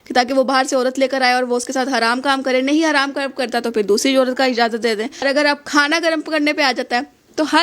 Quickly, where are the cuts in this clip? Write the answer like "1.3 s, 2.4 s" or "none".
5.2 s